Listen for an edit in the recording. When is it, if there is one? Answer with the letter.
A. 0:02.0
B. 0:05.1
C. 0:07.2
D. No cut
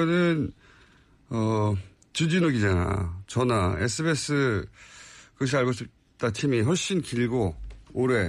D